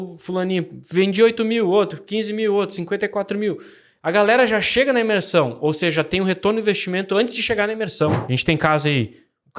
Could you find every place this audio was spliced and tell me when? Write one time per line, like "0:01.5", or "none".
0:08.3